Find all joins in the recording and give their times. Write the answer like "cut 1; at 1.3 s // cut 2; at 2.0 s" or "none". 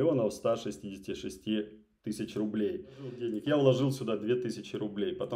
cut 1; at 3.3 s

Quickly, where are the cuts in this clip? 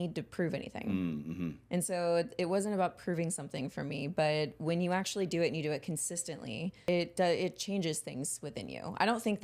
cut 1; at 6.9 s

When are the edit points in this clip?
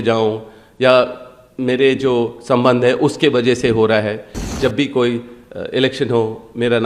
cut 1; at 4.4 s

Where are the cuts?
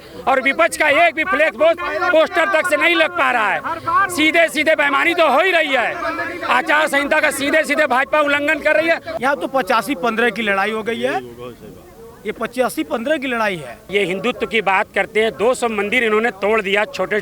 cut 1; at 9.1 s // cut 2; at 13.7 s

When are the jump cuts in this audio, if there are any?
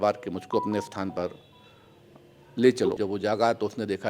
cut 1; at 3.0 s

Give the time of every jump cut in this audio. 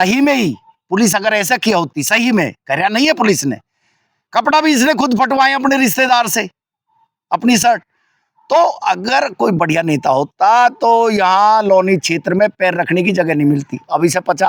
none

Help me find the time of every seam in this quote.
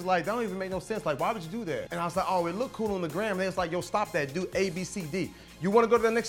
cut 1; at 1.8 s // cut 2; at 5.4 s

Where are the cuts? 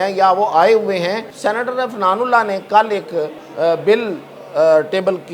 cut 1; at 1.3 s // cut 2; at 3.4 s

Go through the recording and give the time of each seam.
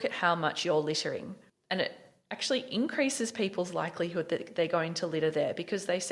cut 1; at 1.5 s

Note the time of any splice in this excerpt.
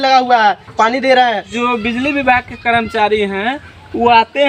cut 1; at 1.5 s

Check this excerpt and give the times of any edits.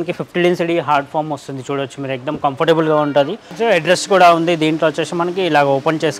cut 1; at 3.5 s

